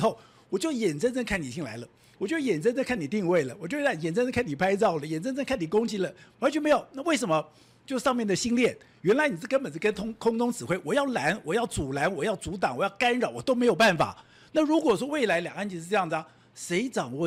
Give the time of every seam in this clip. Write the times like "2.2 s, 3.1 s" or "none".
none